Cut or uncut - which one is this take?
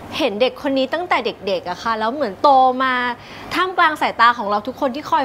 uncut